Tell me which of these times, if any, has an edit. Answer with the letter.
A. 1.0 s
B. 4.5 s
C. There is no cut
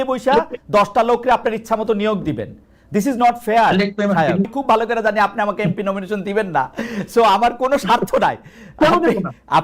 B